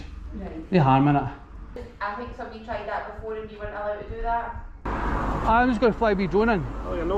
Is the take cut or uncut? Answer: cut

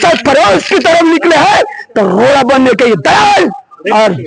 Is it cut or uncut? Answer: uncut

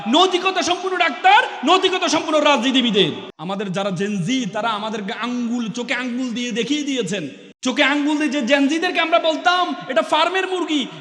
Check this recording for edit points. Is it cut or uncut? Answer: cut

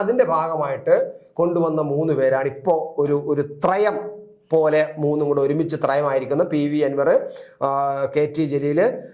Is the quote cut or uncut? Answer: uncut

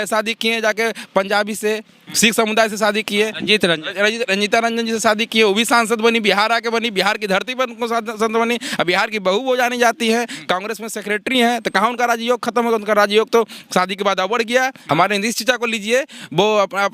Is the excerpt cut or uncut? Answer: cut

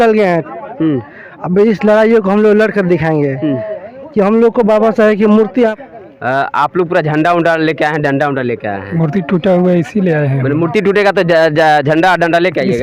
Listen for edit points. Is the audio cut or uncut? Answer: cut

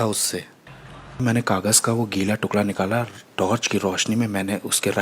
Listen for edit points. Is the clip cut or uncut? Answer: cut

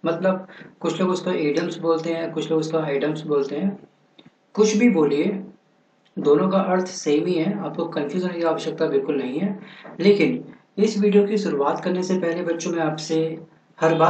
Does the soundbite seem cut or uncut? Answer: uncut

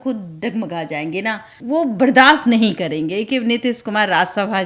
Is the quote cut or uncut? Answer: cut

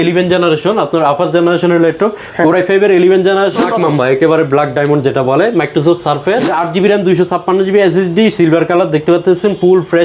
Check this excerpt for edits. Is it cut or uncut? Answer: cut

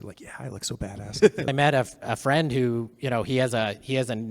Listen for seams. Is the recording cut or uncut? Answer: cut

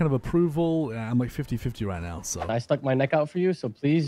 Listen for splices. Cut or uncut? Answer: cut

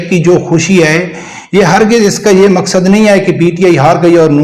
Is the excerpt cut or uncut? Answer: uncut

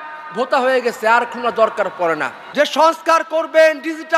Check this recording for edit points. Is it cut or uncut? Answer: cut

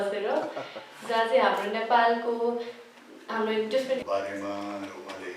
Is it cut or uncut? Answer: cut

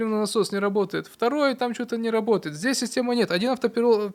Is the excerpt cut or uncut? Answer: uncut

